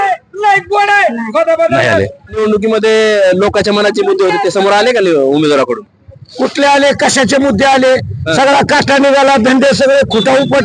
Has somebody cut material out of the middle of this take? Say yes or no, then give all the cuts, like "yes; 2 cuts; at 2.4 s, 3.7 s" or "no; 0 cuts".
yes; 1 cut; at 2.4 s